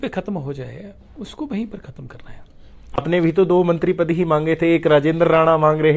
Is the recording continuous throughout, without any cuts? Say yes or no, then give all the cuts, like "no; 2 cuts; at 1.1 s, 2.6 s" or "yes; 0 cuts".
no; 1 cut; at 3.0 s